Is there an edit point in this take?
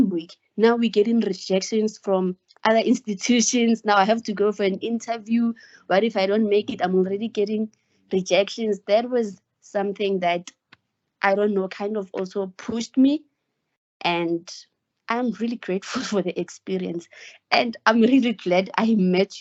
no; 0 cuts

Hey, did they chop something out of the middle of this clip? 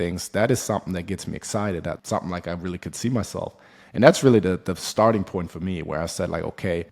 yes; 1 cut; at 2.0 s

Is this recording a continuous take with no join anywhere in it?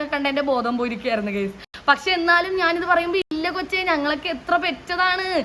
yes; 0 cuts

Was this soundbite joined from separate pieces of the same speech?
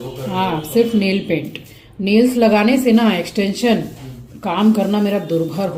no; 0 cuts

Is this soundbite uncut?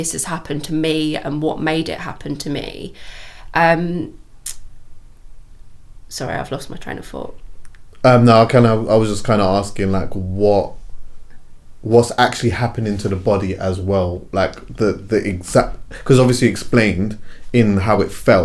yes; 0 cuts

